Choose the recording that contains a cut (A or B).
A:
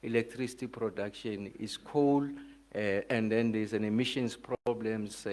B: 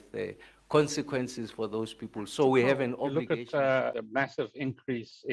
B